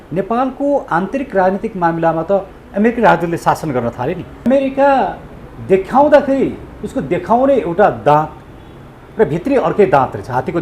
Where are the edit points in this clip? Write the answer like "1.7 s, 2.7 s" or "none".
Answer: 4.3 s